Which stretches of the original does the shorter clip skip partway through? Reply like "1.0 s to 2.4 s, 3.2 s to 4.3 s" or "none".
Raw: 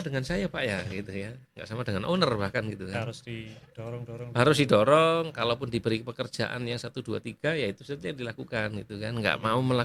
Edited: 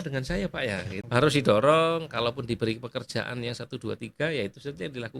1.0 s to 4.2 s